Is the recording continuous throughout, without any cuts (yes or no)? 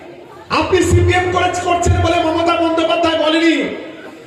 yes